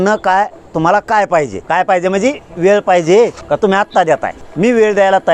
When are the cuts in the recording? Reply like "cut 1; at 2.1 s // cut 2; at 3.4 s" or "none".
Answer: cut 1; at 1.6 s // cut 2; at 3.4 s // cut 3; at 4.4 s